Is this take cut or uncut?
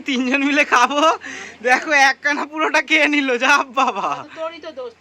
uncut